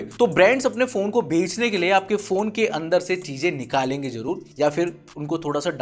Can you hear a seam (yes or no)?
no